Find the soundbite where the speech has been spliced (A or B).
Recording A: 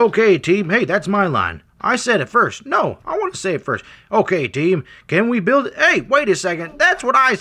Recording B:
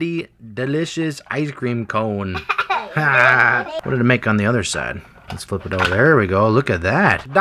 B